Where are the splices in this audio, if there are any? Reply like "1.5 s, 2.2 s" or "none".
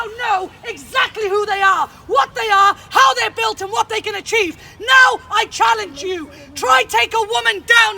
none